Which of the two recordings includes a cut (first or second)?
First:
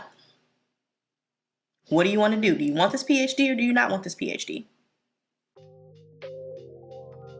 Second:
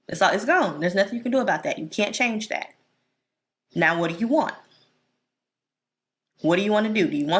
first